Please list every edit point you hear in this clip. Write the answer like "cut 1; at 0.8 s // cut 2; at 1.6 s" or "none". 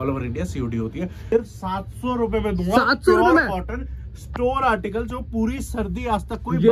cut 1; at 1.2 s